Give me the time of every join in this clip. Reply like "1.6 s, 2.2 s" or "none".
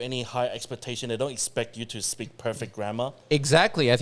none